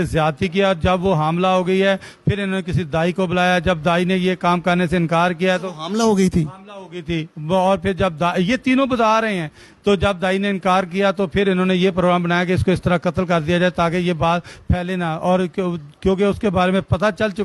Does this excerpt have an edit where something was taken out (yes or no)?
no